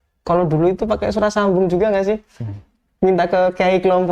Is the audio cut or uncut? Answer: uncut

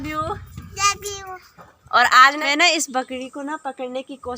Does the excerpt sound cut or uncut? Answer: cut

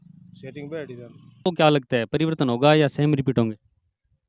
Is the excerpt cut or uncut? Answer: cut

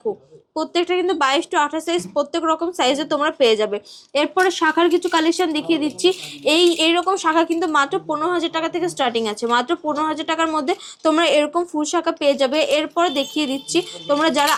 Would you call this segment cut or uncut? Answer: uncut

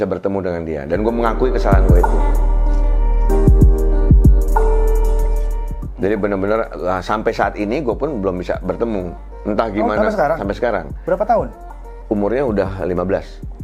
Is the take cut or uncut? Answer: uncut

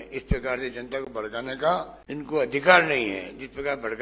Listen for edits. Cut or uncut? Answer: cut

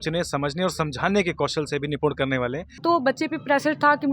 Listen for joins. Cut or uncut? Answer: cut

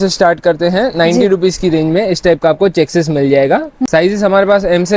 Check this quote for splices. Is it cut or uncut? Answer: cut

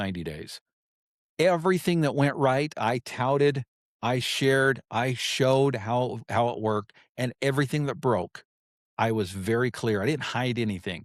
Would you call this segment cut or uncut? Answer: uncut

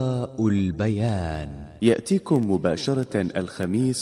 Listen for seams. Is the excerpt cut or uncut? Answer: cut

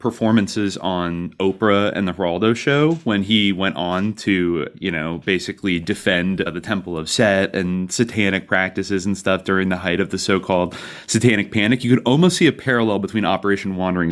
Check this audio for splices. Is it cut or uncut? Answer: uncut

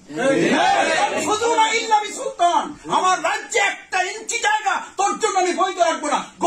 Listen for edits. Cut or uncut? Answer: uncut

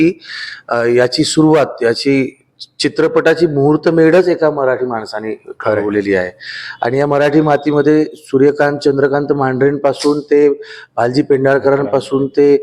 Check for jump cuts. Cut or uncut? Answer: uncut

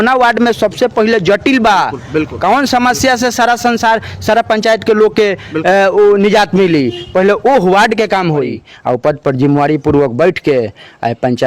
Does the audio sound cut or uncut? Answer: cut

